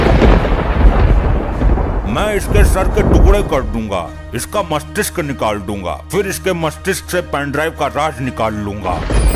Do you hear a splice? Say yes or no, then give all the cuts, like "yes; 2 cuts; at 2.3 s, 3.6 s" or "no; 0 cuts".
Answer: no; 0 cuts